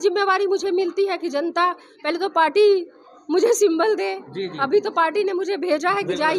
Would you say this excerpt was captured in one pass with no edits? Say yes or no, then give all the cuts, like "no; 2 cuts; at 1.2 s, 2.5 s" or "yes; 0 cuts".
yes; 0 cuts